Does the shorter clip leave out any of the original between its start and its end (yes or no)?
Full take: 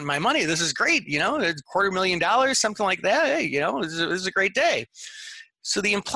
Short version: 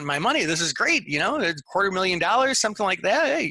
no